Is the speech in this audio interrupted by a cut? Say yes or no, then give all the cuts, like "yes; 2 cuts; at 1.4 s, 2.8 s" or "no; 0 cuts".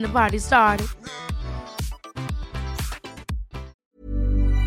yes; 1 cut; at 3.7 s